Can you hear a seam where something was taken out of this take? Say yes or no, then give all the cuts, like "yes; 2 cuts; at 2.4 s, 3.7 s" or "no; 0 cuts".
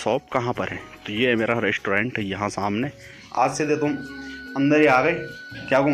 yes; 1 cut; at 3.2 s